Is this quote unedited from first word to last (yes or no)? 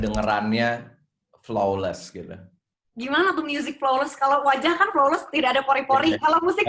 yes